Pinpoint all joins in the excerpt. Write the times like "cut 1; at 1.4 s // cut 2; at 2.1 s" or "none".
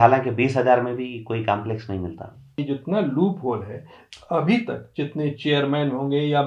cut 1; at 2.6 s